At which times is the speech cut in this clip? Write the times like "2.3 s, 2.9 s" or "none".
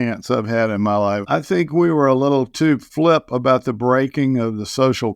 1.2 s